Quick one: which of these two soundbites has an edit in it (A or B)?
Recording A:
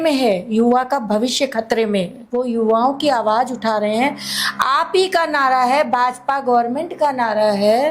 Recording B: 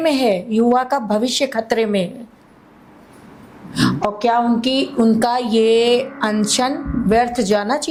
A